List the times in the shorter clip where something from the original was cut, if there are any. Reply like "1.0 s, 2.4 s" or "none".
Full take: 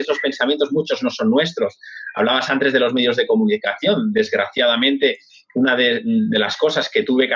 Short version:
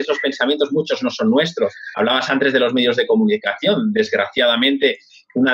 1.8 s